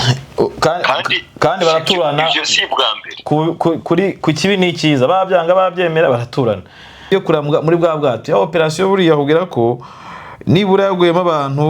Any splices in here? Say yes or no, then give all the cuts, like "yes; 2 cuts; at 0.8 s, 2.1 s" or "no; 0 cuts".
yes; 1 cut; at 7.0 s